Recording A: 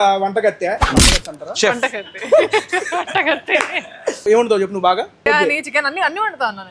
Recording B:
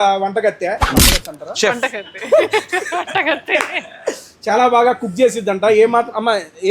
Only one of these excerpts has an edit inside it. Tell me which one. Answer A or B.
A